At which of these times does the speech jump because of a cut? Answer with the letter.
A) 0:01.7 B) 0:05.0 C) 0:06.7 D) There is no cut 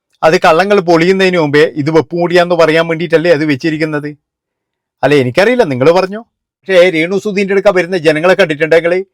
C